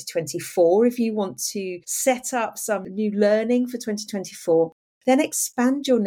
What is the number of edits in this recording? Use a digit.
1